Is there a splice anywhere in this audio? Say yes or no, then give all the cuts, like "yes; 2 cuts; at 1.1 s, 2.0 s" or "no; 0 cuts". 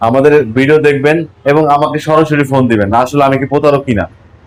no; 0 cuts